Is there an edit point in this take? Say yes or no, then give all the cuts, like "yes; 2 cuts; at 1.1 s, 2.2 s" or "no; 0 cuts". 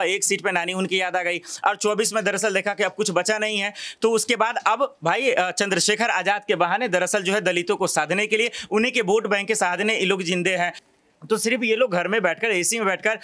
yes; 1 cut; at 10.9 s